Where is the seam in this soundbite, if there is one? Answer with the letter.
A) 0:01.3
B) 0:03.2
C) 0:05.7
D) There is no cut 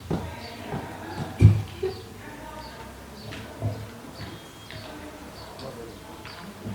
D